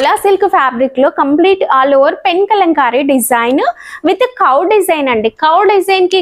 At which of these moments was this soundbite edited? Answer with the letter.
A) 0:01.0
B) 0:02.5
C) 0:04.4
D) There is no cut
D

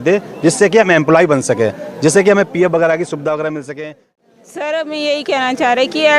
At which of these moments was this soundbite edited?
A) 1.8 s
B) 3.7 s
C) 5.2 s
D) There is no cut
B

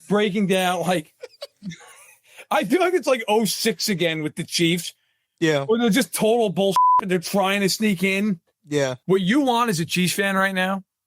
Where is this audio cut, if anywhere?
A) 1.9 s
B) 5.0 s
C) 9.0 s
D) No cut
C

